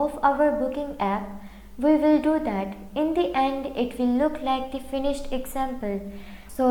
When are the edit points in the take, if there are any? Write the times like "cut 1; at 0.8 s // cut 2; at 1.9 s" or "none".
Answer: none